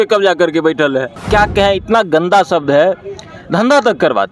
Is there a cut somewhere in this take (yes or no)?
yes